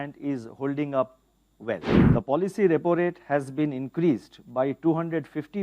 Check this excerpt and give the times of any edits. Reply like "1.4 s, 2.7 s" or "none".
1.9 s